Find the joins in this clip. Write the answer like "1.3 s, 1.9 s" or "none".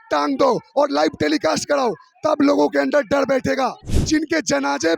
3.9 s